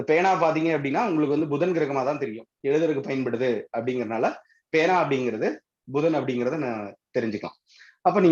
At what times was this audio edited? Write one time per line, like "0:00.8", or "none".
none